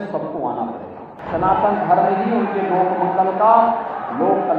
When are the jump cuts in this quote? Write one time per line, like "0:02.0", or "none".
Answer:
0:01.2